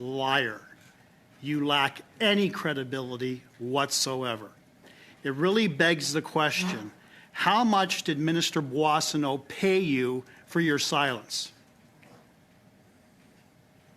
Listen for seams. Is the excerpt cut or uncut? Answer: uncut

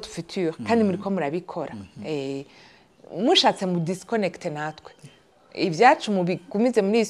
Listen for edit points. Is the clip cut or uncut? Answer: uncut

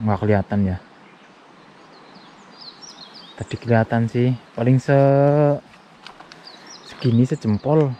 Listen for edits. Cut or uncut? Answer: uncut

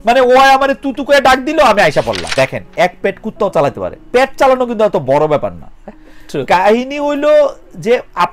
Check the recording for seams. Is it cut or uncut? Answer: cut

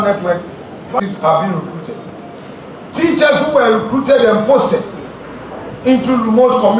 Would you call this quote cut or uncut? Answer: cut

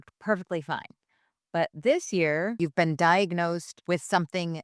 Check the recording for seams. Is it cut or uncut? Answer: cut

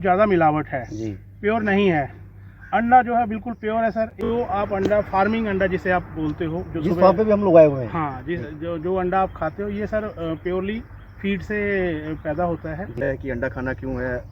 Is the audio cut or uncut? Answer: cut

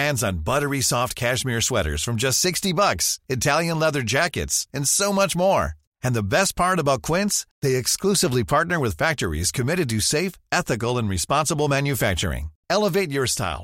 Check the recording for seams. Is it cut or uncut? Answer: uncut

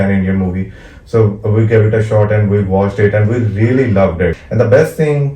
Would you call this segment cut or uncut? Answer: cut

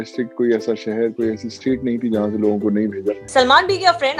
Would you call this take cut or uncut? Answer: cut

